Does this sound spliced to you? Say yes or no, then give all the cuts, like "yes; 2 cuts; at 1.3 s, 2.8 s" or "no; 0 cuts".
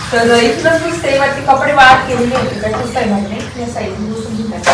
no; 0 cuts